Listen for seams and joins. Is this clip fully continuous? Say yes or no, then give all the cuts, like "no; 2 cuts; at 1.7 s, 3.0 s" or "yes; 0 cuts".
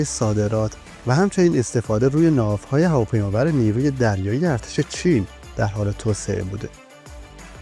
no; 1 cut; at 6.7 s